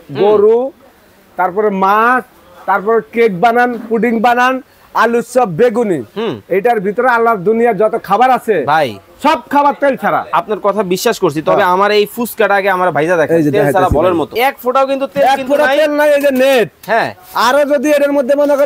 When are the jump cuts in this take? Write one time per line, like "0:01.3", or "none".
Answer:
0:14.3